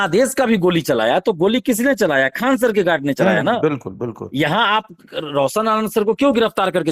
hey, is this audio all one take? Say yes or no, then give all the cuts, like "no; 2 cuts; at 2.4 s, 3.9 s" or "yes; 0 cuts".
yes; 0 cuts